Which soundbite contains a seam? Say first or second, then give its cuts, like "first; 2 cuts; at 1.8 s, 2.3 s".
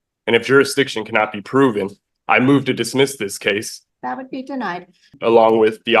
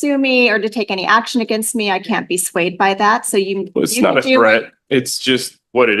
first; 2 cuts; at 3.8 s, 5.1 s